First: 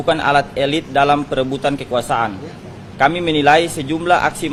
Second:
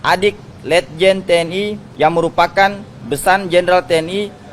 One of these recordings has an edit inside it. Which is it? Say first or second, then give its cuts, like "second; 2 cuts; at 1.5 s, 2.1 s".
second; 1 cut; at 1.8 s